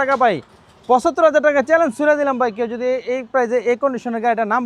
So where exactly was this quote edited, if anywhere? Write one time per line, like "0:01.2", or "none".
none